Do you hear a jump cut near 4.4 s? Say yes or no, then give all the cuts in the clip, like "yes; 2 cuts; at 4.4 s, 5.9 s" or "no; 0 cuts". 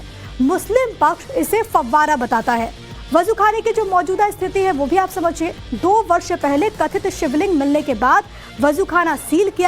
yes; 1 cut; at 4.4 s